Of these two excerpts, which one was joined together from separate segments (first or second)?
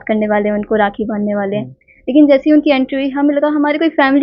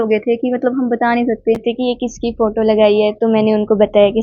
second